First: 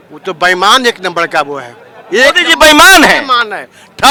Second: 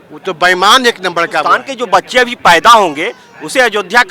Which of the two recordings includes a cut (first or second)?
second